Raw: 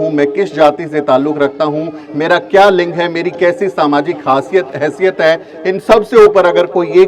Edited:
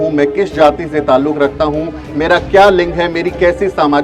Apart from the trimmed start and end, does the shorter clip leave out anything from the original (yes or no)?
no